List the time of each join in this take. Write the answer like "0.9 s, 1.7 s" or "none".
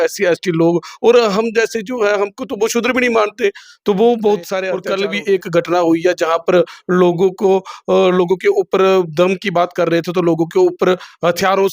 4.8 s